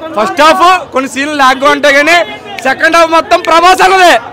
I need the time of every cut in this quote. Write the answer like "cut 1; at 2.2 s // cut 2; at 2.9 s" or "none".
none